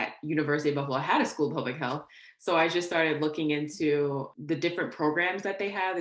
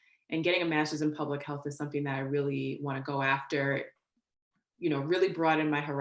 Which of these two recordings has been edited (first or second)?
first